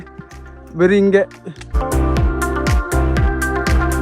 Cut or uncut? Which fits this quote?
cut